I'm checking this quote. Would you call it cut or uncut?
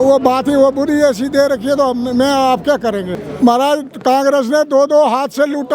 cut